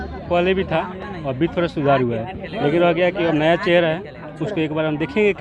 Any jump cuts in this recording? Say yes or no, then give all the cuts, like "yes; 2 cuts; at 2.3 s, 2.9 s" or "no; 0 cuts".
no; 0 cuts